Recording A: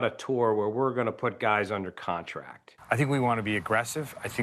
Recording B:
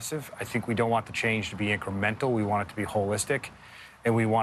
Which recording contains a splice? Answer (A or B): A